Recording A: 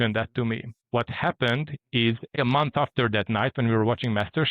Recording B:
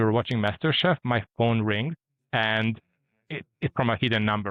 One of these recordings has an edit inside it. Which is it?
A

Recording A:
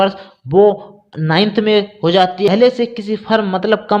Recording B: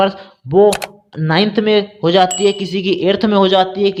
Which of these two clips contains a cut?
A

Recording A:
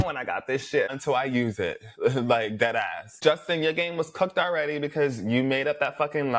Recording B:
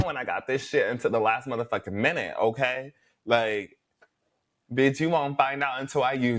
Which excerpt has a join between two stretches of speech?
A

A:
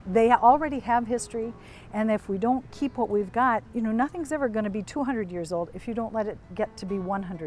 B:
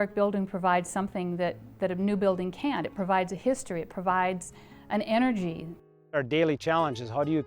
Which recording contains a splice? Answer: B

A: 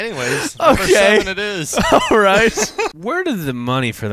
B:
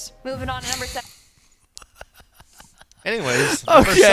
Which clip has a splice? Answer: A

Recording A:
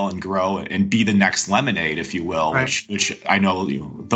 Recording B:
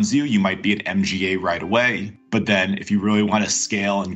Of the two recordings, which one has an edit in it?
B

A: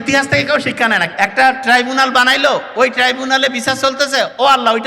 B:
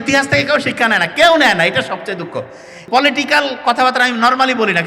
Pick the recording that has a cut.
A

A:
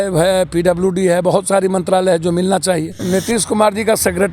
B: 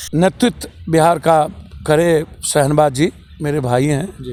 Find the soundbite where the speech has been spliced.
A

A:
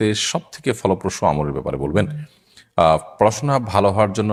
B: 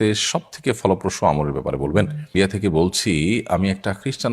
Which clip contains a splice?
B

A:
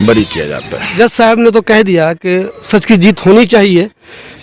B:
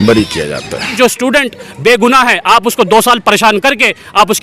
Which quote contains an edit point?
B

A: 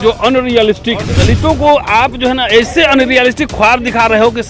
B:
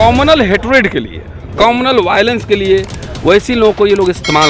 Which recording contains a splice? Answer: A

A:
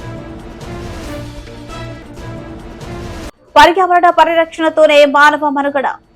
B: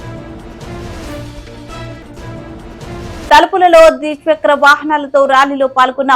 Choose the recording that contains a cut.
B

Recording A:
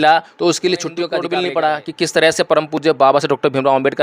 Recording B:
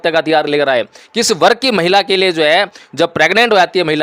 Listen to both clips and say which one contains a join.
A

